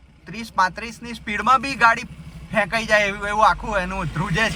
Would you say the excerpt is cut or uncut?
uncut